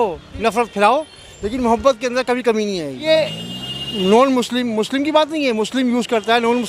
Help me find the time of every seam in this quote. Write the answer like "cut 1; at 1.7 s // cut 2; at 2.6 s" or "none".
cut 1; at 3.0 s